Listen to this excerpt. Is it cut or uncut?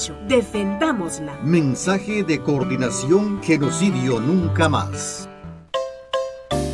cut